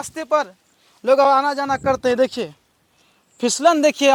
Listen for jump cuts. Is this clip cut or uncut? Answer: uncut